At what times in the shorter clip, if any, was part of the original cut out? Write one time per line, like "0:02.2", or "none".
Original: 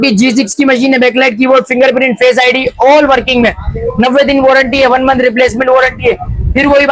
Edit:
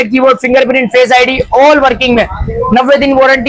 none